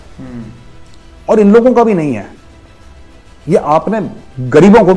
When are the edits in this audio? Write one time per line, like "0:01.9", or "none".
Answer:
none